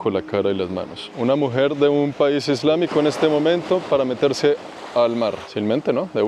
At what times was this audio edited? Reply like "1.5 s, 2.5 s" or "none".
1.0 s